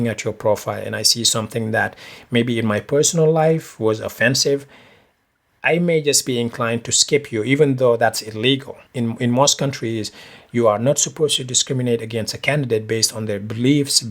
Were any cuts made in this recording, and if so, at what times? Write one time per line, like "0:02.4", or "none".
0:08.8